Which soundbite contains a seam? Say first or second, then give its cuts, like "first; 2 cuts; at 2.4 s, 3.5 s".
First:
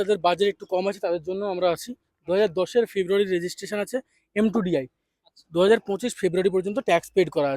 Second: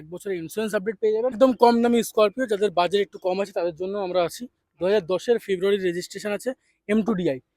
second; 1 cut; at 1.4 s